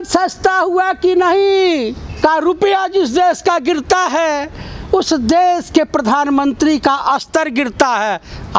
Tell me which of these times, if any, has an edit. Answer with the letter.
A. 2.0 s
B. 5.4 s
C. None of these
A